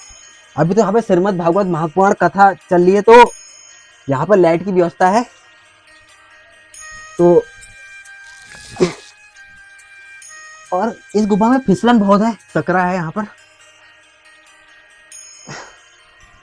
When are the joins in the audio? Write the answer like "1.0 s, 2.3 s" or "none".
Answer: 12.4 s

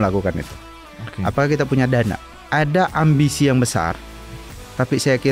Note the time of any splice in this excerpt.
2.3 s

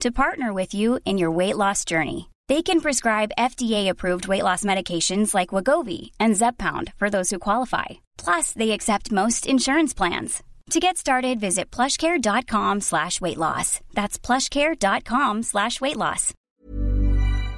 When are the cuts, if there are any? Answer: 16.3 s

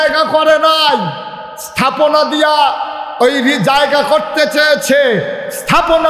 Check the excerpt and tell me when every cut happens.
none

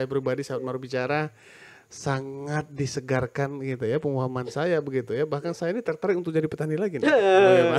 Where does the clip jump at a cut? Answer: none

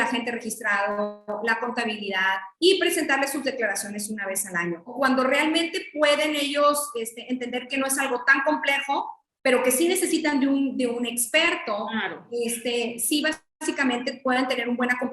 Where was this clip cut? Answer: 4.9 s

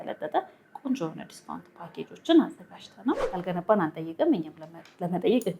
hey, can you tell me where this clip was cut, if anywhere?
3.3 s

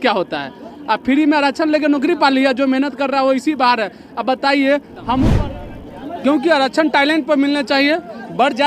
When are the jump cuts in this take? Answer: 5.3 s

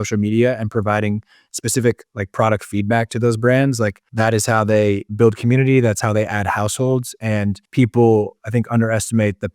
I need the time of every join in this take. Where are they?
4.0 s, 7.6 s

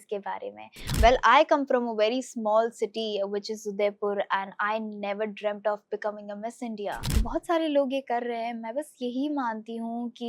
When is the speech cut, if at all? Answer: 0.9 s, 7.2 s

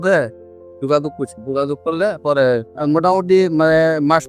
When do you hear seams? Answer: 2.7 s

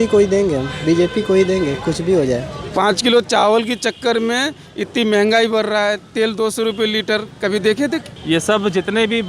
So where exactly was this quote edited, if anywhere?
2.6 s, 8.1 s

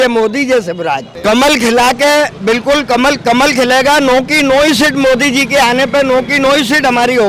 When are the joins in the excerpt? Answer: 1.1 s

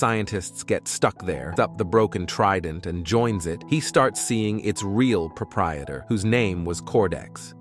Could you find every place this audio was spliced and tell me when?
1.5 s

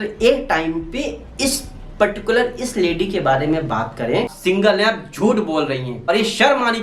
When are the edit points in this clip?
4.3 s, 6.1 s

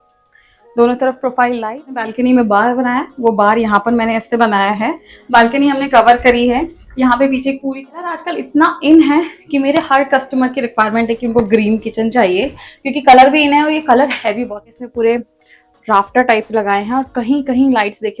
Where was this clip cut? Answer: 2.1 s, 8.1 s, 14.4 s

